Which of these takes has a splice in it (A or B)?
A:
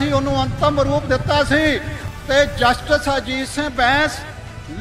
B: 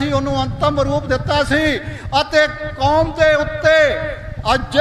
A